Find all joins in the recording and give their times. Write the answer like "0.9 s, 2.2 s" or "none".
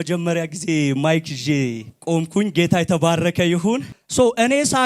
1.9 s, 4.0 s